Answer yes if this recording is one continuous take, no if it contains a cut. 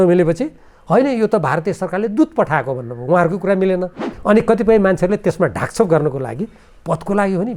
no